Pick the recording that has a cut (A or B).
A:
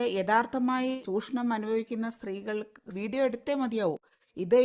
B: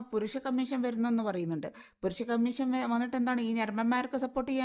A